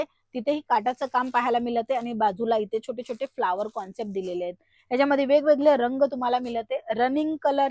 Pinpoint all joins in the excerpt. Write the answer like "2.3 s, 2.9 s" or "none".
none